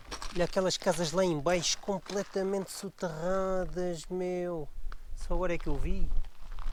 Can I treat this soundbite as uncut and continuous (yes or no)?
yes